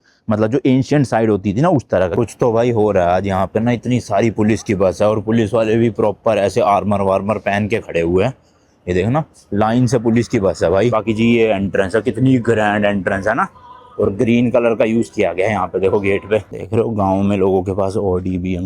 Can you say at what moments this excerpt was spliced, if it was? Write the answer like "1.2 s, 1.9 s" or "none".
2.1 s, 10.9 s, 16.6 s